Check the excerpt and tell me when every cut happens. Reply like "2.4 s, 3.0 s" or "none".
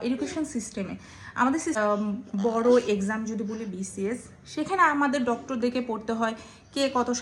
1.8 s

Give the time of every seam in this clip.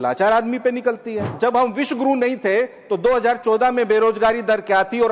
1.2 s

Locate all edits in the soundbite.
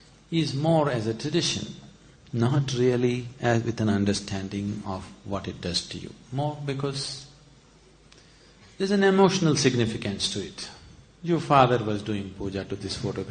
11.1 s

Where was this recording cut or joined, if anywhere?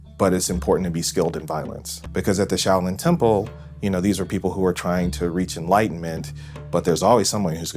2.0 s

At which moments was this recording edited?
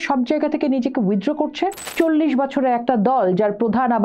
1.8 s

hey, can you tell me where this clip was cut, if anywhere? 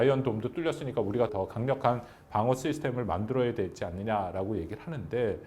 1.3 s

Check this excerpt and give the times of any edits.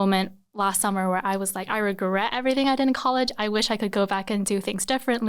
none

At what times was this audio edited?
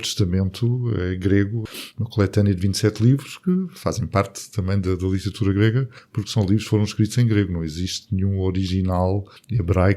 1.6 s

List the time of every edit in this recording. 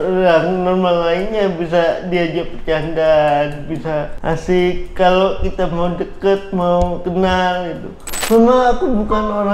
8.2 s

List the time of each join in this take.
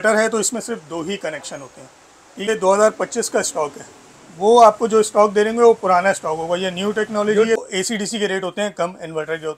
2.5 s, 7.6 s

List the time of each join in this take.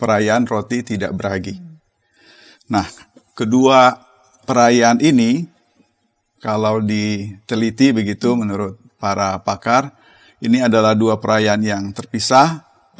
none

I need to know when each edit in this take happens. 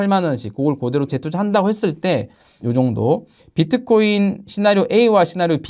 none

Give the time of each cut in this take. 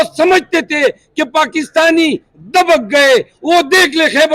none

